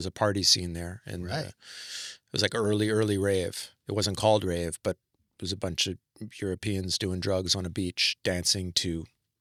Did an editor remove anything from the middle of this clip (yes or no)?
no